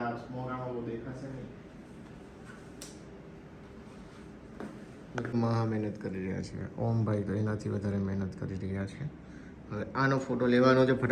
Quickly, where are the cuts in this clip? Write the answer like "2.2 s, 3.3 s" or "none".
5.3 s